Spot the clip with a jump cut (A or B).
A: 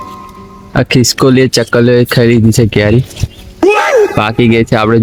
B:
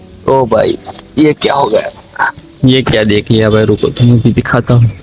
B